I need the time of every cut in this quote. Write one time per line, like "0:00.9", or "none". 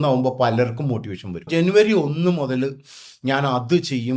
0:01.5